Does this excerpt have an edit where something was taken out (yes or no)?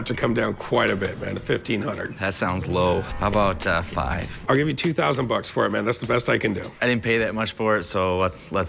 yes